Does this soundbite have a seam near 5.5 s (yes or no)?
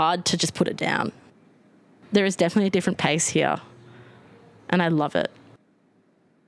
yes